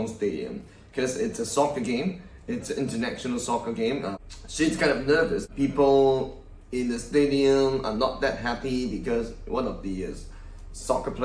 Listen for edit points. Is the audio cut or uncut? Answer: uncut